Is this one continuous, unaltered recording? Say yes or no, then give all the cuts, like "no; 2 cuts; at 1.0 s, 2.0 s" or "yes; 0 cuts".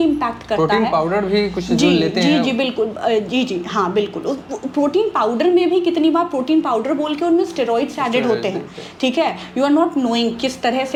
yes; 0 cuts